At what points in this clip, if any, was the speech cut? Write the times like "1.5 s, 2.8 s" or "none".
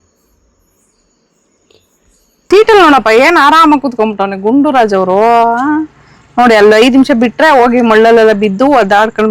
2.4 s